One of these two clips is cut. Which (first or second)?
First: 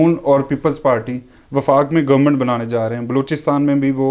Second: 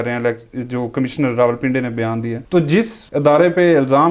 second